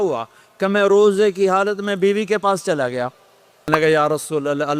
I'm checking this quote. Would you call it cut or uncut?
cut